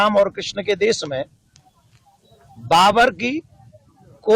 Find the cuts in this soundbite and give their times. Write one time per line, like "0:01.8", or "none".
none